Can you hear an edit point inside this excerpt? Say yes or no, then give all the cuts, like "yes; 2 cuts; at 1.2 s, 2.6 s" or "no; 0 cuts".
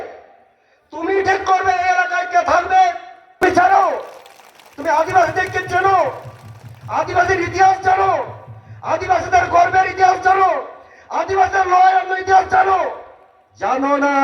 yes; 1 cut; at 3.4 s